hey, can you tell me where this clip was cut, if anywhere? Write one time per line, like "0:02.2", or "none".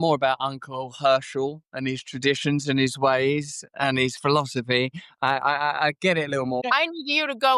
0:06.6